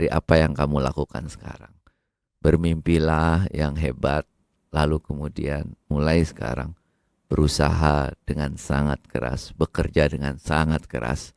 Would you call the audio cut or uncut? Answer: uncut